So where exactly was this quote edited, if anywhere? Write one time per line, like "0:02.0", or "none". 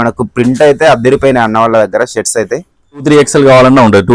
0:03.0